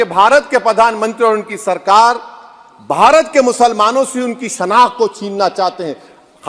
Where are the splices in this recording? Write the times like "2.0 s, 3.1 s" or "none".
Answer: none